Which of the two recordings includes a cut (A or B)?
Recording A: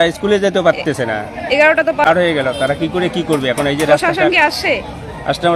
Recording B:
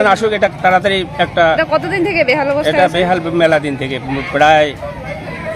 A